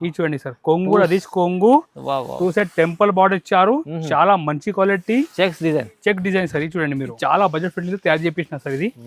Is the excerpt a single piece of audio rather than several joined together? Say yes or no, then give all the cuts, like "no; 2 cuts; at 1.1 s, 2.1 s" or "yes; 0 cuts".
no; 1 cut; at 7.1 s